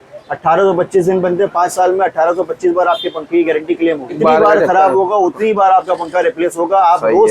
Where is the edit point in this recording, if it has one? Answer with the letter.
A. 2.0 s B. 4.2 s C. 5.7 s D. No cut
B